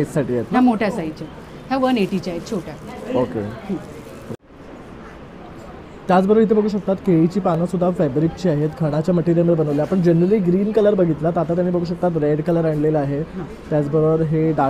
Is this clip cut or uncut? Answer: uncut